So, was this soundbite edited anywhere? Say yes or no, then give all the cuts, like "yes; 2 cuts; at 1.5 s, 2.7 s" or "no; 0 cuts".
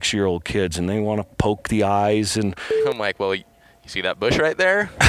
yes; 1 cut; at 2.7 s